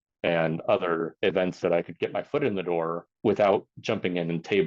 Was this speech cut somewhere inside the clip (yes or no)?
yes